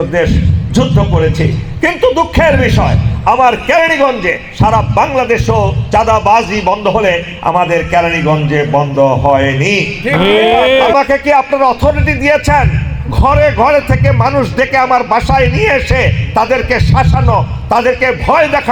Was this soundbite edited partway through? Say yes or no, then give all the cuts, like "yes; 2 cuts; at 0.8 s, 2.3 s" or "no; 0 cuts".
yes; 1 cut; at 10.9 s